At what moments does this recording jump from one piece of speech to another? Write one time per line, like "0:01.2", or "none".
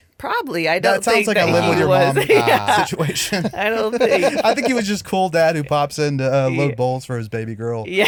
none